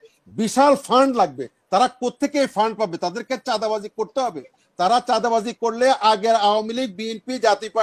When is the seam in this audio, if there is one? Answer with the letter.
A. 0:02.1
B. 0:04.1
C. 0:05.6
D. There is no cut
D